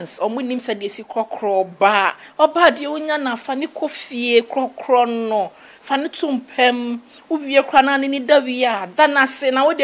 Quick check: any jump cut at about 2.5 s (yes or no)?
no